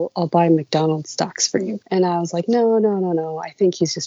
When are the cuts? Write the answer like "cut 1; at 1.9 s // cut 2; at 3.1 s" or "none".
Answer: cut 1; at 1.8 s